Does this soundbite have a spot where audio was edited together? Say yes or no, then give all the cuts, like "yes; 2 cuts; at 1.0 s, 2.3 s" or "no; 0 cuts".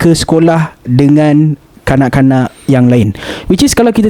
no; 0 cuts